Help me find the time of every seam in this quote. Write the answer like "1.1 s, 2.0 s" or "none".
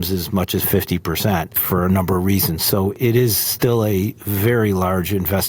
1.6 s, 3.0 s

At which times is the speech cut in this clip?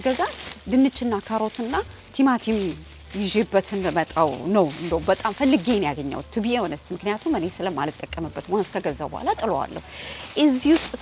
none

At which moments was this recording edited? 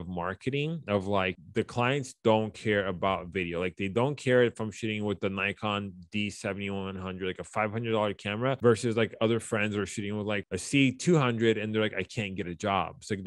1.3 s, 10.4 s

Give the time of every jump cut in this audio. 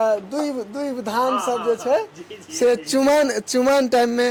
none

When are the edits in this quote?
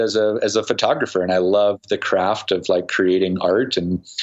none

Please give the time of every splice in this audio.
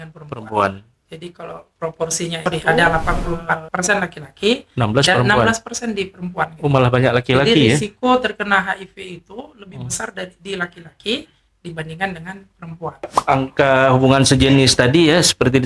2.5 s, 13.1 s

